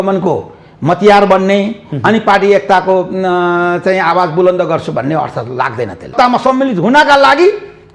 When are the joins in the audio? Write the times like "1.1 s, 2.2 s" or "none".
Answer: 6.1 s